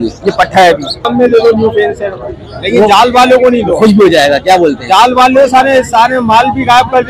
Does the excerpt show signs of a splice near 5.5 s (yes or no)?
no